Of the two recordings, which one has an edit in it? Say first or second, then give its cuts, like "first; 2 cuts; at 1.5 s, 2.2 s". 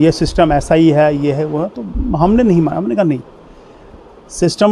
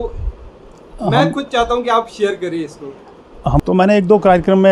second; 1 cut; at 3.6 s